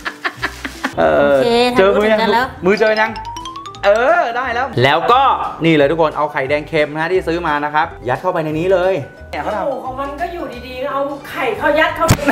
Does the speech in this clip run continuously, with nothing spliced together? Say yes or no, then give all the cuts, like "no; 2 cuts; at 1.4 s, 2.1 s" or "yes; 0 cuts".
no; 2 cuts; at 0.9 s, 9.3 s